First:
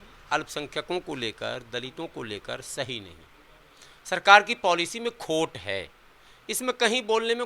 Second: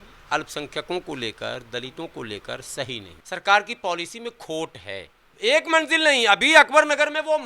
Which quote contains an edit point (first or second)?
second